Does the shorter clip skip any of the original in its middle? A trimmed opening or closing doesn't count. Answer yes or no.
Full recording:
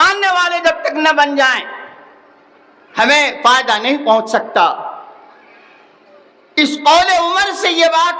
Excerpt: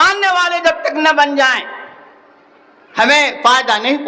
no